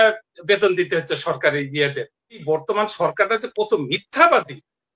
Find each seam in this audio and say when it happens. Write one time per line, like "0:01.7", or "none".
0:02.4